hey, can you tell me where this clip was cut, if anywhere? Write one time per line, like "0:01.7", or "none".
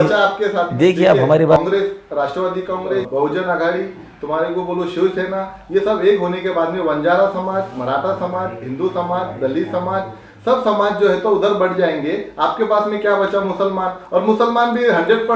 0:01.6
0:03.1